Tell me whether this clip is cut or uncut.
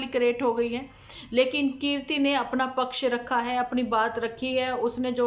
uncut